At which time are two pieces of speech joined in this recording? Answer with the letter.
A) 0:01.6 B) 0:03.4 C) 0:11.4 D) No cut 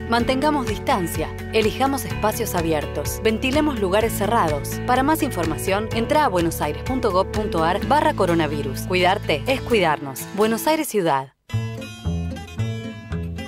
C